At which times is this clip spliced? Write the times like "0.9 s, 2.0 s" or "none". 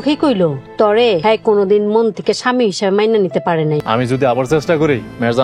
1.1 s, 3.8 s